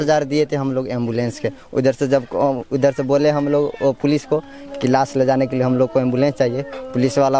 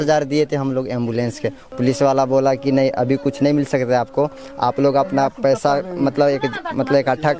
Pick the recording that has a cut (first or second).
second